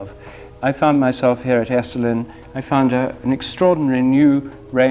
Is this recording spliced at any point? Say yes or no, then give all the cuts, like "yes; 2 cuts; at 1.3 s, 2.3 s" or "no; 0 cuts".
no; 0 cuts